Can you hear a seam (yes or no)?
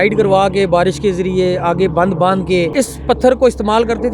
yes